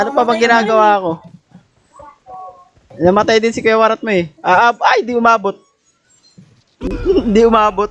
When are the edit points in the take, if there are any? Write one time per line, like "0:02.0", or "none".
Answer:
0:02.9